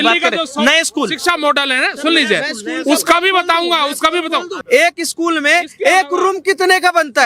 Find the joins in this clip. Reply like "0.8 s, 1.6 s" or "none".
4.6 s

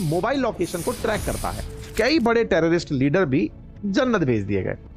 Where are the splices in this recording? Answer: 1.9 s

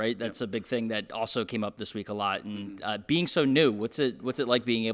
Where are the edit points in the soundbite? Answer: none

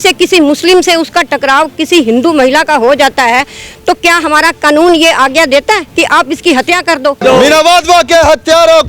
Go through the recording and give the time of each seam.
5.9 s, 7.2 s

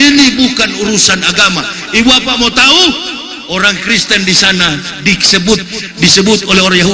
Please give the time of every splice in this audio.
none

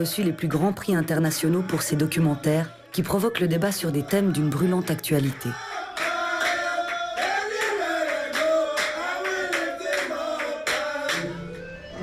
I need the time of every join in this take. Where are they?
10.2 s

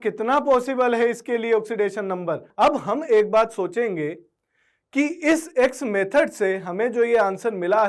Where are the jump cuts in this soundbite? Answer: 2.5 s

